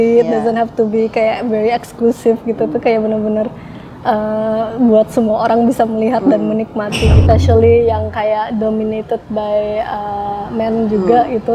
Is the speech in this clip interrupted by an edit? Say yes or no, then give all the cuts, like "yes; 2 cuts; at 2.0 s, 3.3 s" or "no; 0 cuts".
yes; 1 cut; at 7.2 s